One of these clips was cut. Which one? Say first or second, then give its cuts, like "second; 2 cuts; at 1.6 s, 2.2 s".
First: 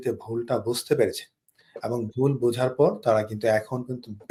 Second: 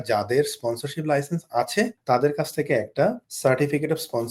second; 2 cuts; at 2.0 s, 3.3 s